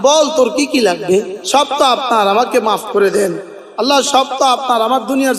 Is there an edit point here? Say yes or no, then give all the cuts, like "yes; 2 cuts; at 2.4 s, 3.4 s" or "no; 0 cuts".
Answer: yes; 1 cut; at 1.4 s